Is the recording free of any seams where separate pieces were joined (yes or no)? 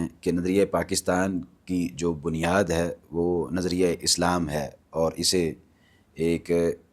yes